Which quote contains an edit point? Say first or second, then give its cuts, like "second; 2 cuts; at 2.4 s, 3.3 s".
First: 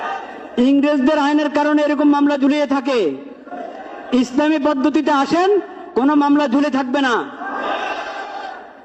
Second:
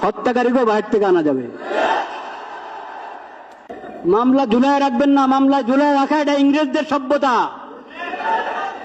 second; 1 cut; at 3.9 s